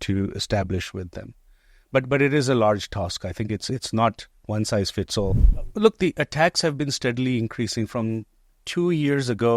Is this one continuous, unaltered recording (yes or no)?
no